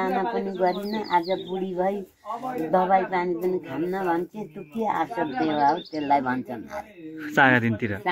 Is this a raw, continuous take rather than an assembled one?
yes; 0 cuts

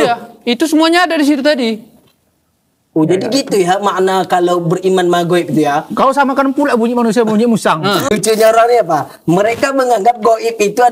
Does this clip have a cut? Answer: yes; 1 cut; at 8.1 s

